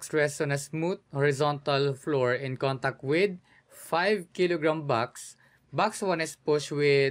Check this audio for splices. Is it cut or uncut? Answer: uncut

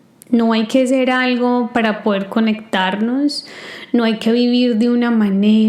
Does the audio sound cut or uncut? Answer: uncut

